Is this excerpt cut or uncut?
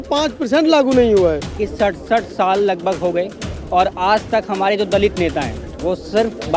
cut